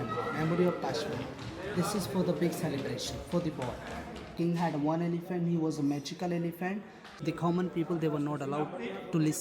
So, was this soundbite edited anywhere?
yes; 2 cuts; at 4.3 s, 7.0 s

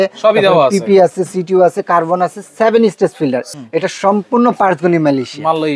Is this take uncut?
no; 1 cut; at 3.5 s

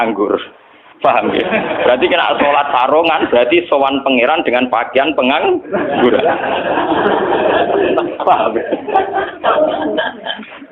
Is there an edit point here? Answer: no; 0 cuts

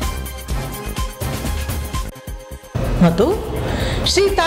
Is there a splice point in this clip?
yes; 1 cut; at 1.9 s

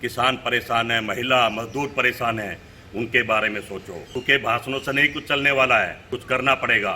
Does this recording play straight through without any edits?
no; 2 cuts; at 4.1 s, 6.1 s

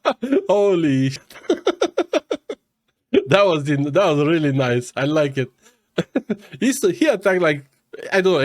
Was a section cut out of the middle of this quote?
yes; 1 cut; at 1.2 s

